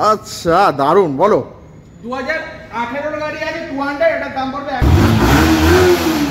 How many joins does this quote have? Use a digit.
1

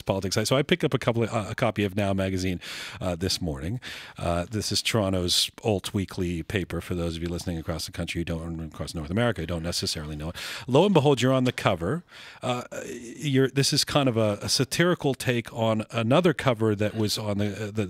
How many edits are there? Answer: 1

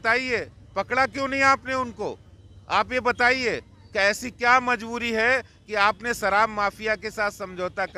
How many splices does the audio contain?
0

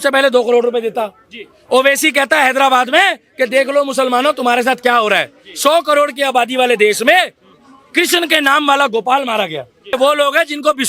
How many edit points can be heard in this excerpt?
1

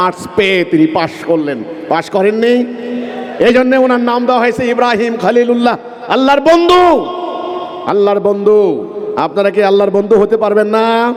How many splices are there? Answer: 0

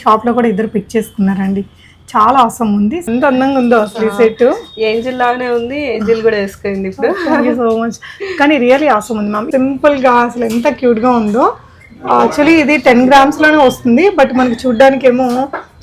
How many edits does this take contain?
2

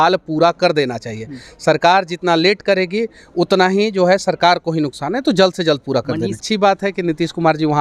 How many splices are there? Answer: 1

